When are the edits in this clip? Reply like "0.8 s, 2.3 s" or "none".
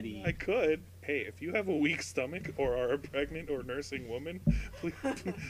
0.9 s